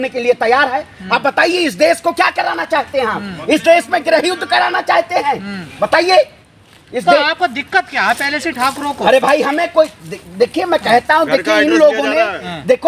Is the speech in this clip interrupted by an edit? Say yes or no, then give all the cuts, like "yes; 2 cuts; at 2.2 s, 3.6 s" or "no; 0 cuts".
no; 0 cuts